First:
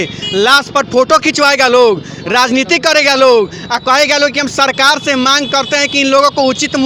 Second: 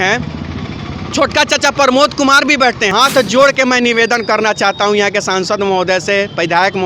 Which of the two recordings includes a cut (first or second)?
second